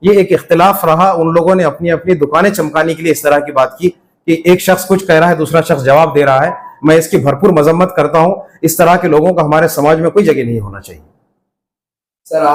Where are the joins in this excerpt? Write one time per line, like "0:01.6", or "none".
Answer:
none